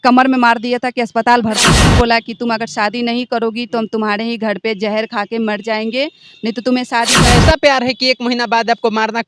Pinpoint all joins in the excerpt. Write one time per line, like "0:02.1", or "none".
0:01.7
0:07.2